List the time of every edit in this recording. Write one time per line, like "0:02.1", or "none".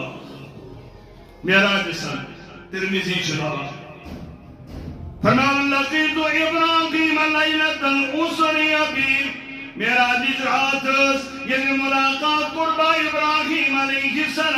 none

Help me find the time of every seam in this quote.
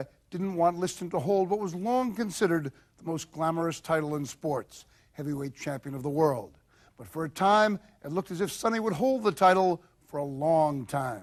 none

